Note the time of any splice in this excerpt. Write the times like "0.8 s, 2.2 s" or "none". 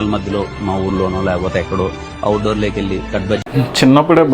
3.4 s